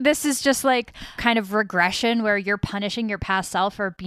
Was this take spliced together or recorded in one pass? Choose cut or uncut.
cut